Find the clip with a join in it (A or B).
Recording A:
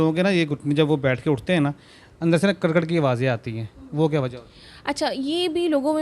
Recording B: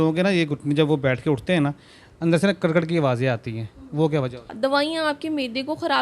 B